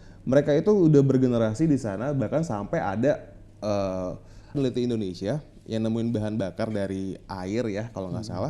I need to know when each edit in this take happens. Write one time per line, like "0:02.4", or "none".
0:04.6